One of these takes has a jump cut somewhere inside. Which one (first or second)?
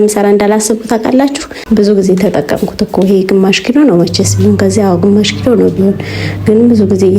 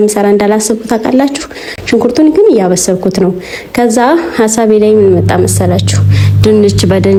first